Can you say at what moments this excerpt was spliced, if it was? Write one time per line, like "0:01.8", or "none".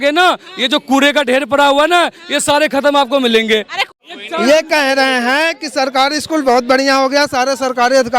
0:03.8